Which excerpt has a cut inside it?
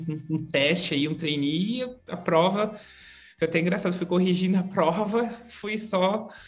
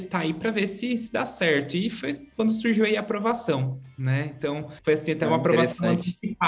second; 1 cut; at 4.7 s

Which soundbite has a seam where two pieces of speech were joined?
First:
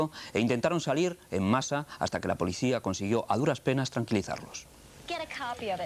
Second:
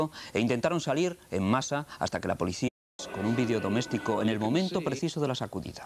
first; 1 cut; at 2.7 s

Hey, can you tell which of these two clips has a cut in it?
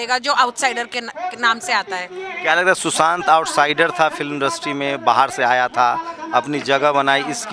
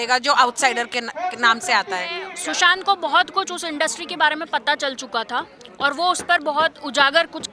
second; 1 cut; at 2.3 s

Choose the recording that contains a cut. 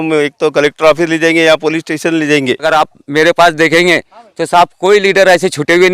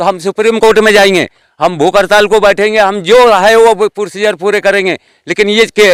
first; 1 cut; at 2.7 s

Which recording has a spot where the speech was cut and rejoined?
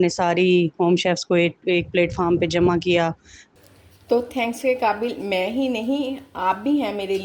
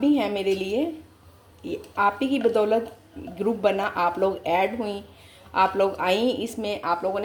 first; 1 cut; at 3.5 s

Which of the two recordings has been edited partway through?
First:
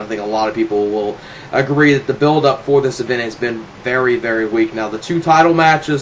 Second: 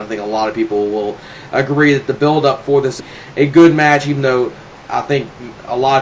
first; 1 cut; at 3.0 s

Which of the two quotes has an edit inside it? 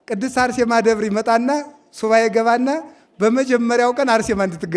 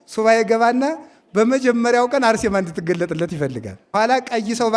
second; 1 cut; at 3.8 s

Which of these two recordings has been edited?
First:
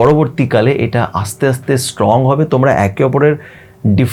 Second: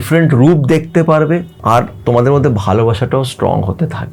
second; 1 cut; at 1.5 s

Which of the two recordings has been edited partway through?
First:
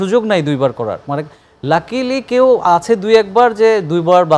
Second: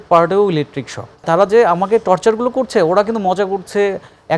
second; 1 cut; at 1.2 s

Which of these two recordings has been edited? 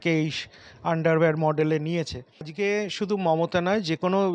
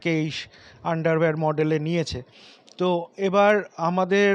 first; 1 cut; at 2.5 s

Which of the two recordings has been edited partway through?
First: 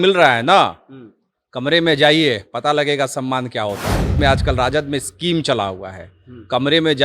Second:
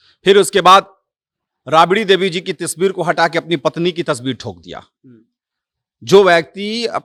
first; 1 cut; at 4.2 s

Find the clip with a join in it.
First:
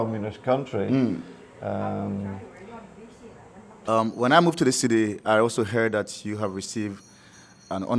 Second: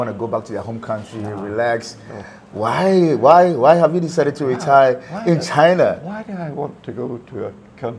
first; 1 cut; at 3.8 s

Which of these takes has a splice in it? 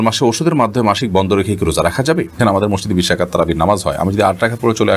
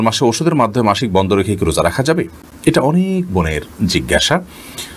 first; 1 cut; at 2.4 s

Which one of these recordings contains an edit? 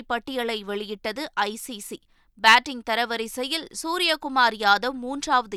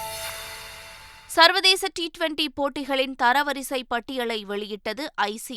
second; 1 cut; at 1.0 s

